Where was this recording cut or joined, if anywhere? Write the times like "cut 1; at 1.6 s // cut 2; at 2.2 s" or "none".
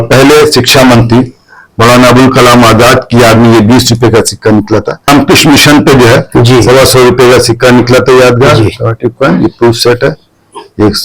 cut 1; at 5.1 s